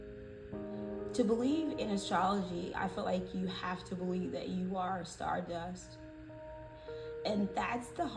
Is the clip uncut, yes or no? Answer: no